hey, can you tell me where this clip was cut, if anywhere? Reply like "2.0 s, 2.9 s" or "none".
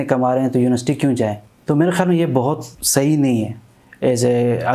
1.5 s, 2.7 s